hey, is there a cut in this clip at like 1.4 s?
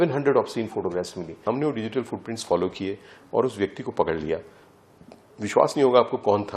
yes; 1 cut; at 1.4 s

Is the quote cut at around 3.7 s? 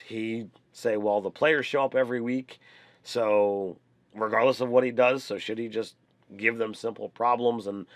yes; 1 cut; at 3.7 s

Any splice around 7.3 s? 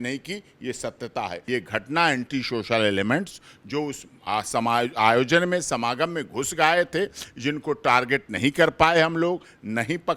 no; 1 cut; at 1.4 s

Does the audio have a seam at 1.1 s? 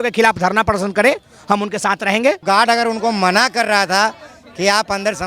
no; 1 cut; at 2.4 s

